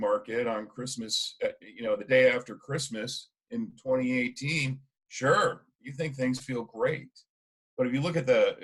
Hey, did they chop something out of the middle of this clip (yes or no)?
no